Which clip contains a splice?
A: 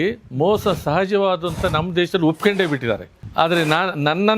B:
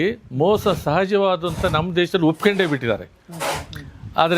A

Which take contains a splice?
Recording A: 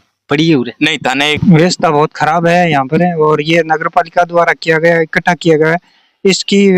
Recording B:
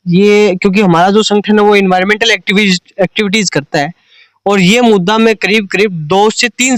A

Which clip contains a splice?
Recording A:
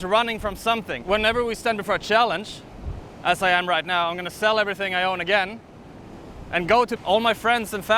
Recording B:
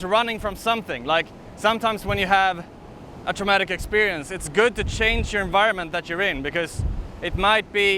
A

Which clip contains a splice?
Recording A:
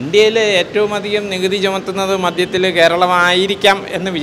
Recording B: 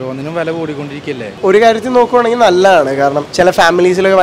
B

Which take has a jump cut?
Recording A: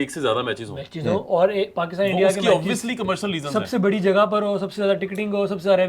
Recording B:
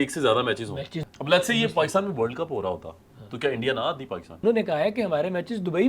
B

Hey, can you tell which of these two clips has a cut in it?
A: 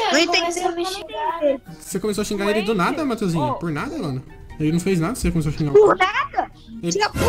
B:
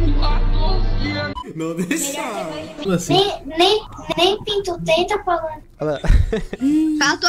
B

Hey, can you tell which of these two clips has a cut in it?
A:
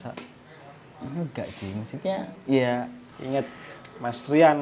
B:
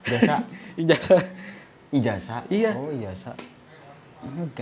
A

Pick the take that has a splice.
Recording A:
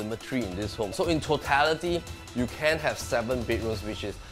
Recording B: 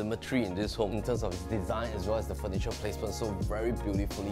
A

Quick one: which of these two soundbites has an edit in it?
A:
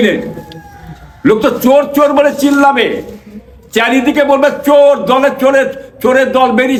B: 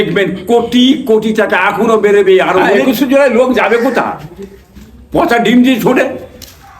B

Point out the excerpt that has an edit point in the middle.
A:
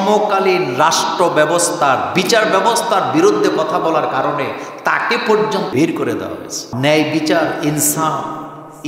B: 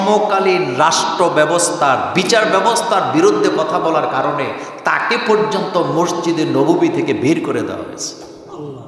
A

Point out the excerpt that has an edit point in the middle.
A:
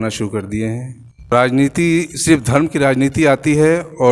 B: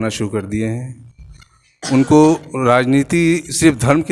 A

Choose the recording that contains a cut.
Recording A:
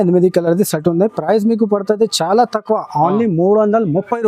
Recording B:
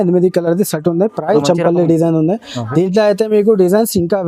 B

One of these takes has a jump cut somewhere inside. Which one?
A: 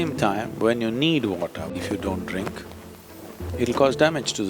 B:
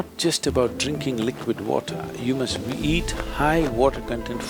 A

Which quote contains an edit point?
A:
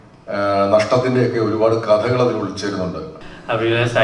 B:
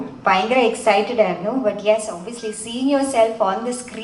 A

